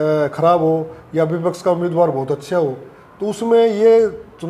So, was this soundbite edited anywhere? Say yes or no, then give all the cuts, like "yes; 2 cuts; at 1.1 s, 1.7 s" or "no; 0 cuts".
no; 0 cuts